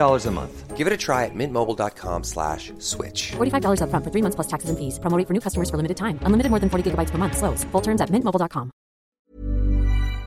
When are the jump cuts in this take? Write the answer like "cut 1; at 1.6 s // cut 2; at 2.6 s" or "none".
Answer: cut 1; at 9.1 s